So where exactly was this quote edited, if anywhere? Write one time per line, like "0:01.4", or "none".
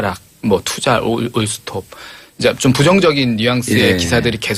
0:02.6